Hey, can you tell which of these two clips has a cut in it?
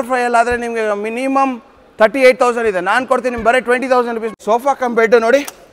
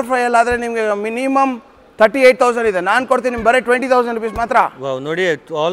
first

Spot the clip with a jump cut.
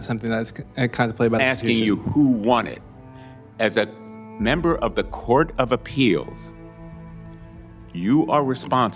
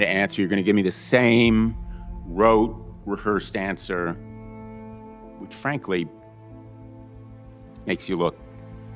first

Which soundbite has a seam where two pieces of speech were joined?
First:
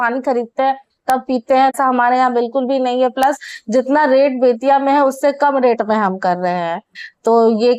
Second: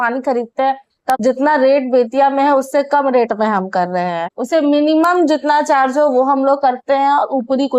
second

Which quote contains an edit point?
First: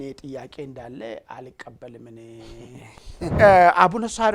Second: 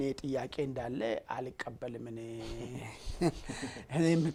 first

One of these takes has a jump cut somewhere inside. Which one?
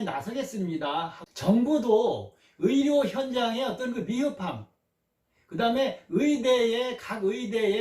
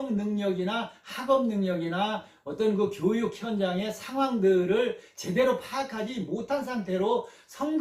first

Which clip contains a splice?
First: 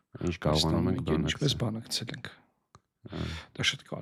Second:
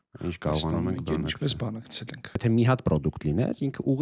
second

